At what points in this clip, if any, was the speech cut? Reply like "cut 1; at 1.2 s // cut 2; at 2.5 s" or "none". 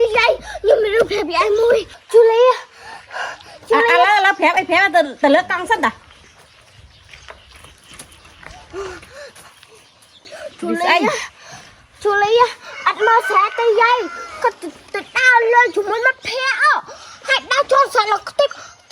cut 1; at 2.0 s // cut 2; at 6.2 s // cut 3; at 10.4 s